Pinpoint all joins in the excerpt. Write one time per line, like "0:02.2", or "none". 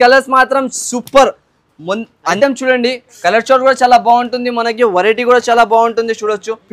0:02.4